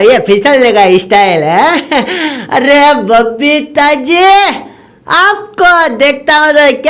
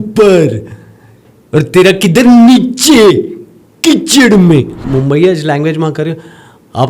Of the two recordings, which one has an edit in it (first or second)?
second